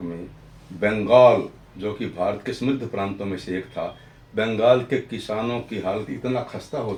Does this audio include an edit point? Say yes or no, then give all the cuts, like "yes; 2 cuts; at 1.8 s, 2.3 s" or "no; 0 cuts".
no; 0 cuts